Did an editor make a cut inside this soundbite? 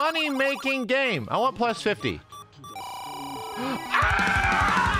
no; 0 cuts

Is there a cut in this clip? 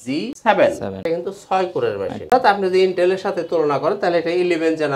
yes; 1 cut; at 1.0 s

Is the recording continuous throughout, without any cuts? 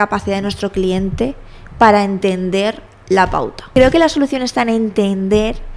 no; 1 cut; at 3.6 s

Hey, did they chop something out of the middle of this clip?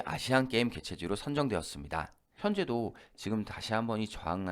yes; 1 cut; at 2.2 s

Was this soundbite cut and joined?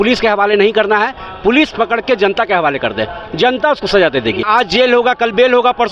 yes; 1 cut; at 4.5 s

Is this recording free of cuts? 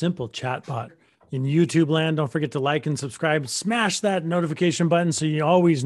no; 1 cut; at 1.0 s

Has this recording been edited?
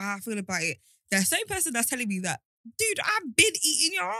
no; 0 cuts

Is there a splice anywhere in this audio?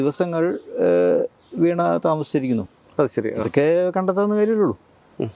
no; 0 cuts

